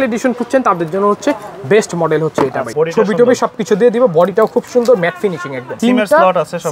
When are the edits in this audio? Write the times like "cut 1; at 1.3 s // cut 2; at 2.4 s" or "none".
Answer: cut 1; at 2.6 s // cut 2; at 5.7 s